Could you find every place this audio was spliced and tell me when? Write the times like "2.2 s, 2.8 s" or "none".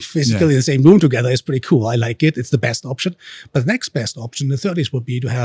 none

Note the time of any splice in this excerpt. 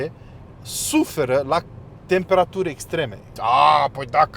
3.2 s

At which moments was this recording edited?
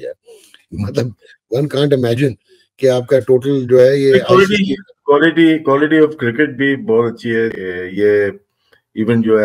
7.6 s

